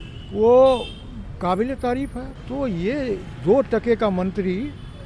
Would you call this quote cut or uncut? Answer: cut